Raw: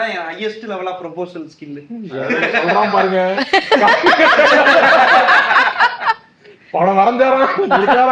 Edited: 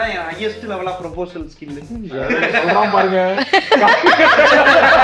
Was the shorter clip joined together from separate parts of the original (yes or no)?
no